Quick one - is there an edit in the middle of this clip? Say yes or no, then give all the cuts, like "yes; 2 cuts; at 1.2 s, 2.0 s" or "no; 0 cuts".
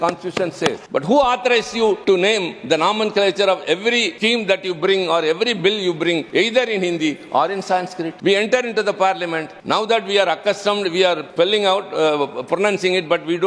yes; 7 cuts; at 0.8 s, 2.0 s, 4.1 s, 6.2 s, 8.1 s, 9.5 s, 11.2 s